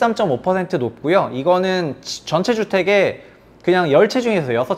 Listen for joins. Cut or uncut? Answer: uncut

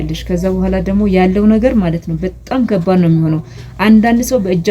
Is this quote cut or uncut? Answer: uncut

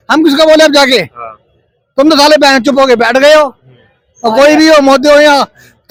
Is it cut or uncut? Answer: uncut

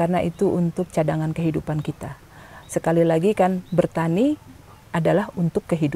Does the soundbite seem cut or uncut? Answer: uncut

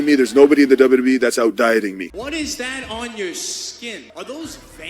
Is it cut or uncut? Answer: cut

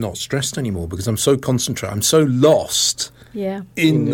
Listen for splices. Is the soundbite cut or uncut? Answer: uncut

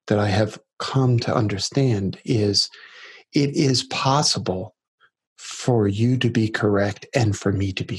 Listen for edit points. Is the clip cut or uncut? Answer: uncut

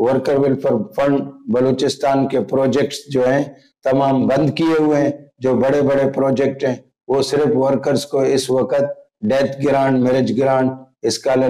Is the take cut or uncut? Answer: uncut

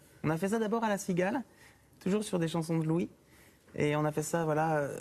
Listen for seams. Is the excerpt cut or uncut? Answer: cut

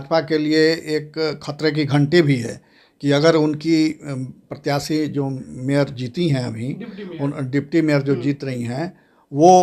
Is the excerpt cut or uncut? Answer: uncut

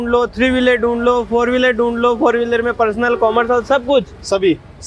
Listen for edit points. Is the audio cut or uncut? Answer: uncut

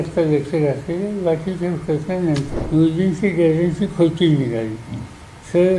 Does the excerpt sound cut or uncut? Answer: cut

